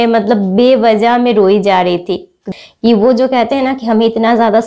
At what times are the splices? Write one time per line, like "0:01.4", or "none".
0:02.5